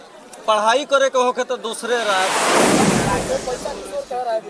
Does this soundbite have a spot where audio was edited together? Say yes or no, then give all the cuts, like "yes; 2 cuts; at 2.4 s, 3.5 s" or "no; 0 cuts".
yes; 2 cuts; at 2.3 s, 3.2 s